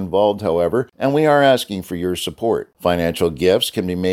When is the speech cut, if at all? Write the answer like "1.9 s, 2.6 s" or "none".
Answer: 0.9 s